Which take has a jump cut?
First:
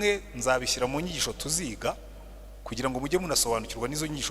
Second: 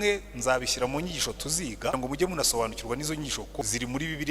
second; 2 cuts; at 1.9 s, 3.6 s

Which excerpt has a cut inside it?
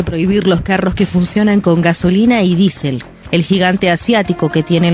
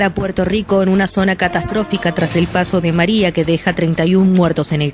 first; 1 cut; at 3.1 s

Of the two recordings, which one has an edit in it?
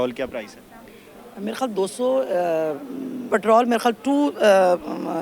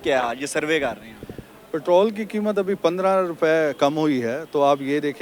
first; 1 cut; at 3.3 s

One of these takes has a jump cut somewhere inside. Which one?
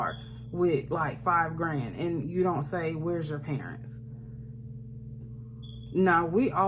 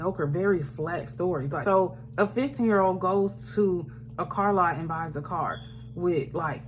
second; 1 cut; at 1.6 s

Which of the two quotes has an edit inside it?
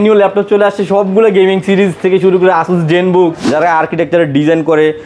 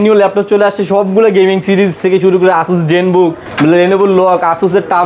first; 1 cut; at 3.4 s

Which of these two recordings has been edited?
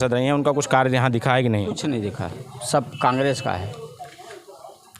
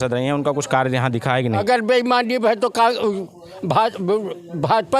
second; 1 cut; at 1.6 s

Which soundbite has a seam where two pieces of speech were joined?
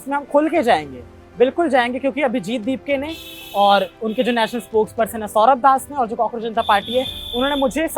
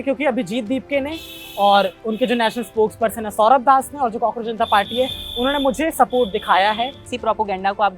second; 1 cut; at 7.0 s

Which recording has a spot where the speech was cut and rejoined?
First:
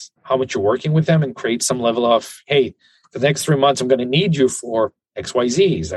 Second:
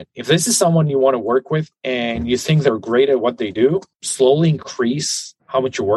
second; 2 cuts; at 1.8 s, 4.0 s

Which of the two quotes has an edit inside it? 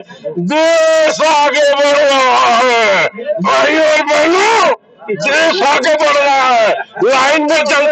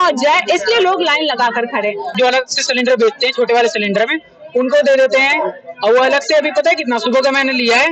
second; 1 cut; at 2.1 s

